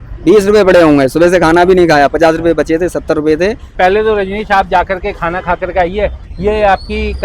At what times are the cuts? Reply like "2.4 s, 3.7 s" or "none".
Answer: 3.7 s